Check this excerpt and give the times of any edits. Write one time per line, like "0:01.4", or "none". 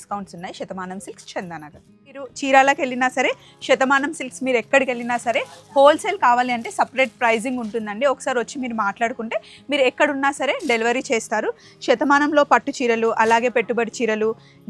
0:02.3

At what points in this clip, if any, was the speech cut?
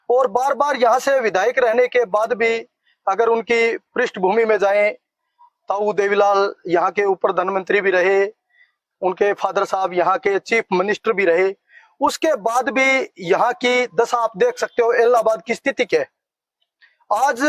none

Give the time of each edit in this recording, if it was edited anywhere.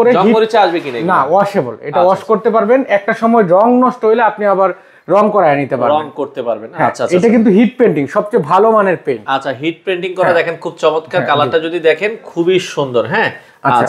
none

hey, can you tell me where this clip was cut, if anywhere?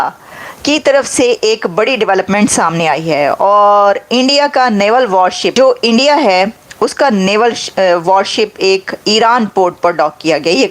0:05.5

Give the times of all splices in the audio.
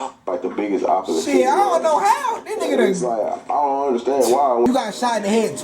0:04.6

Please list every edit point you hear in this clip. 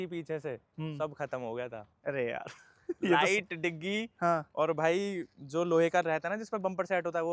none

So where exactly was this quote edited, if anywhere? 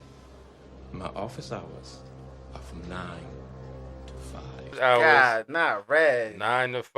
0:04.7

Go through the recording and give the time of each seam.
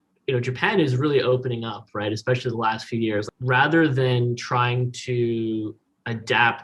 0:03.3

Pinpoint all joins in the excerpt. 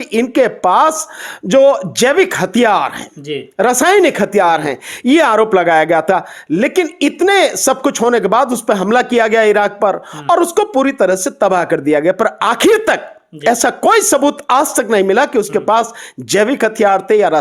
none

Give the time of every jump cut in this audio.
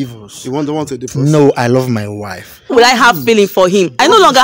0:02.6

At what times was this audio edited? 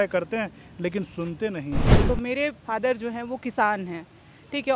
0:01.9

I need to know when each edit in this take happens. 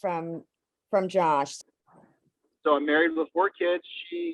0:01.5

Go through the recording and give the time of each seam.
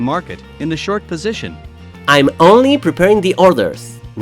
0:01.8

